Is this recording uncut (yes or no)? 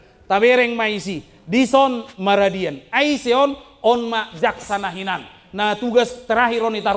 yes